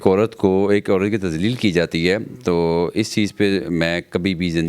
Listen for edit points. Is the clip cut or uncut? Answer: uncut